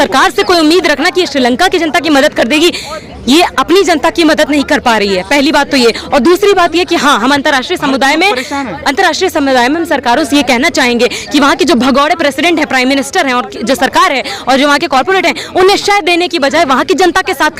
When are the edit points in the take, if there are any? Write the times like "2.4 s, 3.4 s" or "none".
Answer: none